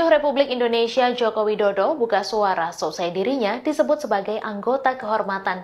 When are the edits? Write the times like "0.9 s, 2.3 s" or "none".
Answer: none